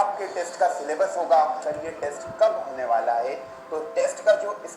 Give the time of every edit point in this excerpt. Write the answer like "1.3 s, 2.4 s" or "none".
1.7 s